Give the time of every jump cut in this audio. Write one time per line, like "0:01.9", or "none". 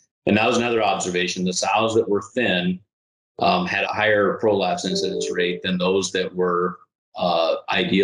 0:03.8